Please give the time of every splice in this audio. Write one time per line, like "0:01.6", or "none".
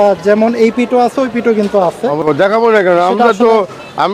0:02.2